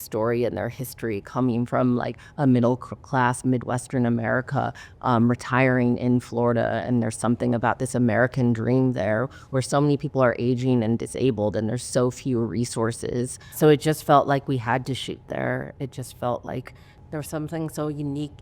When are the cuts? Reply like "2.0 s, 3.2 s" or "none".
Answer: 13.5 s, 16.9 s